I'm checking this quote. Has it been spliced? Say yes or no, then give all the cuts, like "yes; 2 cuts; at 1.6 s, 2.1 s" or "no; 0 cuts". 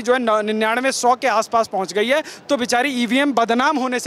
no; 0 cuts